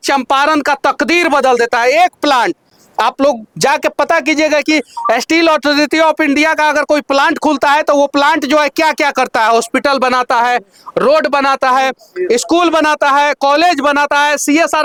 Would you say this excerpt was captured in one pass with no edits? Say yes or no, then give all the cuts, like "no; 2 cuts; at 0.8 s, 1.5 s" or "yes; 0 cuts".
yes; 0 cuts